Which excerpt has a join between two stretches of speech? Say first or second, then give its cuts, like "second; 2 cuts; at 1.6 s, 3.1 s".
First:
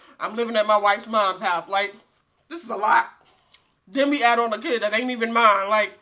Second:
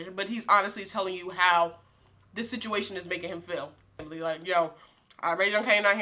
second; 1 cut; at 4.1 s